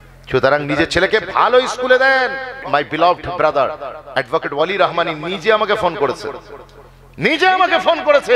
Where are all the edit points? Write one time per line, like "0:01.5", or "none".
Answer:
0:02.6